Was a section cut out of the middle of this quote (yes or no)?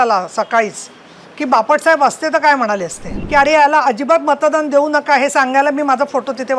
yes